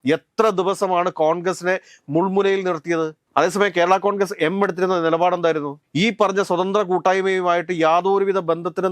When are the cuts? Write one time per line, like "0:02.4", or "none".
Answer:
0:03.2
0:05.8

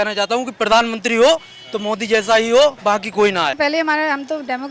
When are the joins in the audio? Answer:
0:03.5

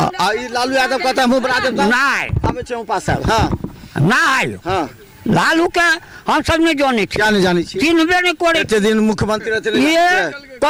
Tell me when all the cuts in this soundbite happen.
none

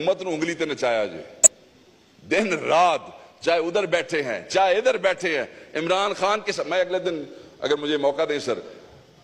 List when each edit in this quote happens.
none

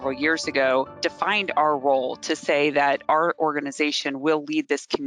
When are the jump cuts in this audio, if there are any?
0:01.0

